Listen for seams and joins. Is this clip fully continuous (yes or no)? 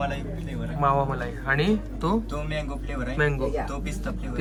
yes